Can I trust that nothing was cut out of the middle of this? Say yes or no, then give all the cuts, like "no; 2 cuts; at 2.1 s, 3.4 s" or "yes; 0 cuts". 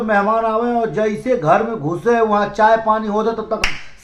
yes; 0 cuts